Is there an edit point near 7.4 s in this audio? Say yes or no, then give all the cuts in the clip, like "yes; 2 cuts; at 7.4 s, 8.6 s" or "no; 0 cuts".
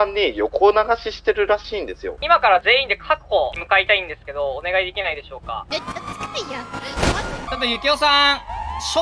yes; 4 cuts; at 2.1 s, 3.6 s, 5.7 s, 7.4 s